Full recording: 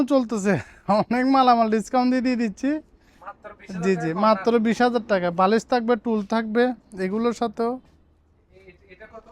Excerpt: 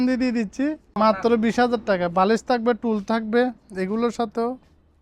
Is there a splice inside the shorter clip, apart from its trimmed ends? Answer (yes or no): yes